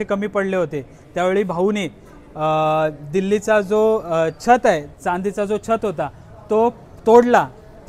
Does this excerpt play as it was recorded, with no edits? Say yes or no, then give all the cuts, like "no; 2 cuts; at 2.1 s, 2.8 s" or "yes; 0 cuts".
yes; 0 cuts